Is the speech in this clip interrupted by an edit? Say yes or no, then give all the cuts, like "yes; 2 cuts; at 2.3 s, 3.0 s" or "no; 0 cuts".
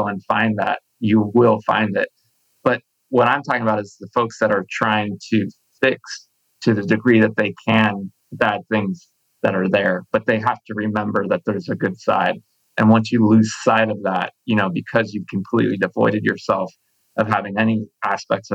no; 0 cuts